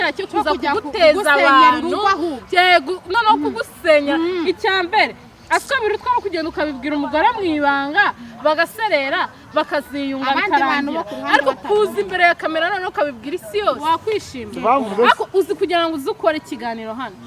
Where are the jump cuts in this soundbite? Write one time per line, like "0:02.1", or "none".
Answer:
0:13.8